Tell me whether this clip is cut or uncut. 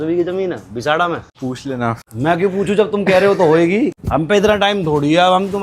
cut